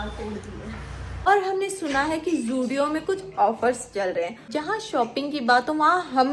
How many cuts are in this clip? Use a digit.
2